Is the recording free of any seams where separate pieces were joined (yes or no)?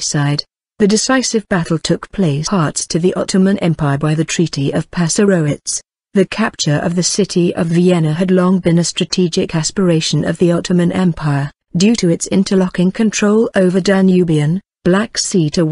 yes